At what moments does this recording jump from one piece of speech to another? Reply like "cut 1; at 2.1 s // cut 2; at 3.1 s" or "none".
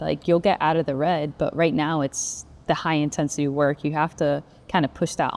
none